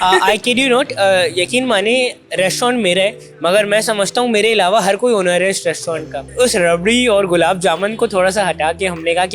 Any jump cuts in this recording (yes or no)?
yes